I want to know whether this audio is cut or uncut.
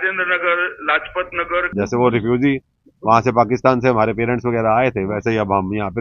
cut